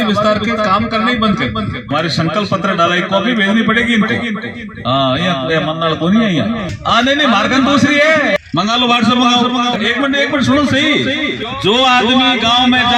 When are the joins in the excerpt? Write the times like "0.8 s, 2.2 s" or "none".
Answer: 1.9 s, 6.7 s, 8.4 s, 9.8 s, 11.4 s